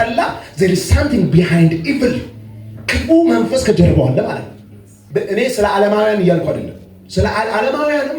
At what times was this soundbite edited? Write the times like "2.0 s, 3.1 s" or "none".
5.0 s